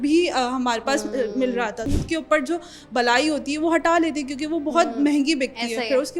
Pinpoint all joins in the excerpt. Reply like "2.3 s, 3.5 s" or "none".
2.1 s